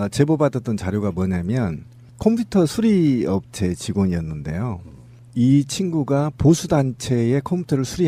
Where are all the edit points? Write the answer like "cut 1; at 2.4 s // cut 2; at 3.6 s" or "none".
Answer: none